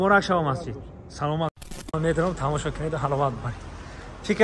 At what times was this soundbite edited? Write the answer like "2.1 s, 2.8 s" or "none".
1.7 s